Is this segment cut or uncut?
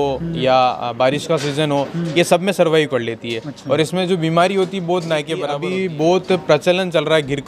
cut